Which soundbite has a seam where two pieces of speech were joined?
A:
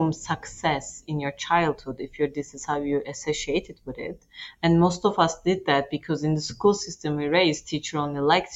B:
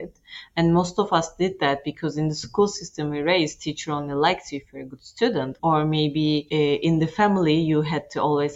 B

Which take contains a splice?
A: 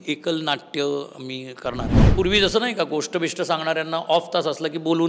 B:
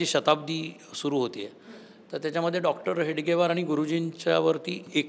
A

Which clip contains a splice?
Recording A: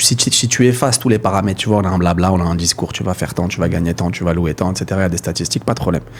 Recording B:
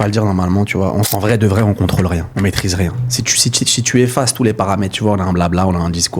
B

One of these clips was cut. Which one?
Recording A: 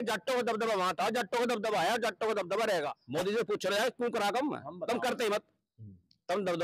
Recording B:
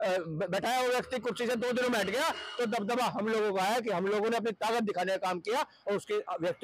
A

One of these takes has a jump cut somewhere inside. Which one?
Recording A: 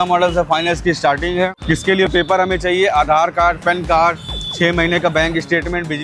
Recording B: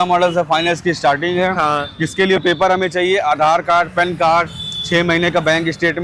A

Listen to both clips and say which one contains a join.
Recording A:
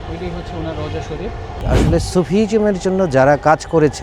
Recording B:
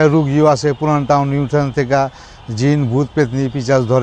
A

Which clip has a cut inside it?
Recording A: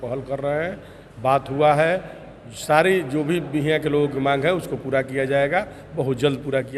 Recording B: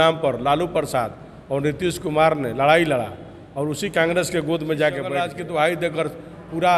B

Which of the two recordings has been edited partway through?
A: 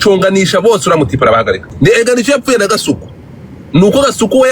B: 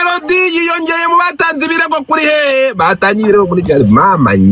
A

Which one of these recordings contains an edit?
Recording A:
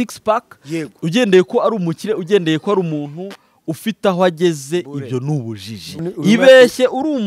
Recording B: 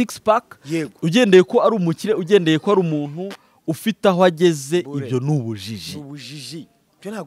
A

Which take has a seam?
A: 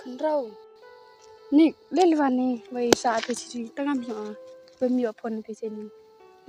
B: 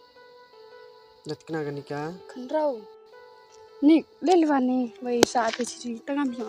B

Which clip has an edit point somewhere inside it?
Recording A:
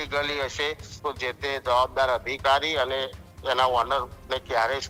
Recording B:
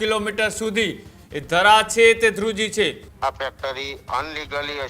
B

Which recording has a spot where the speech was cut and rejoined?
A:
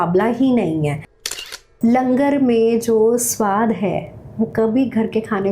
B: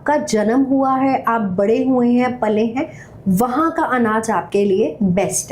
A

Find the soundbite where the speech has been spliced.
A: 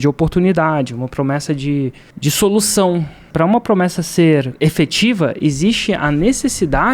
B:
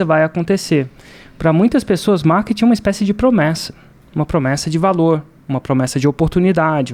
A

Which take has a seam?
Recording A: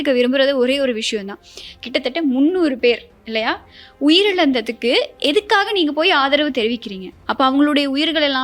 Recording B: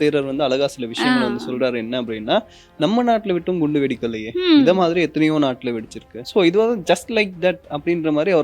B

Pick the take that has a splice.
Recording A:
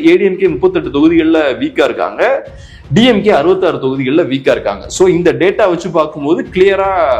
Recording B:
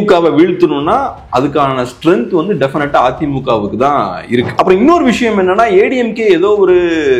B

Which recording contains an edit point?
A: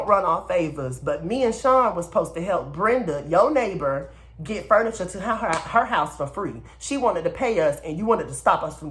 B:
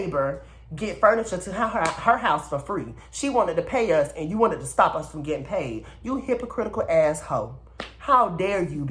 B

